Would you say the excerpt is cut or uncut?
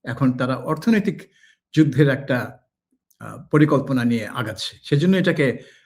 uncut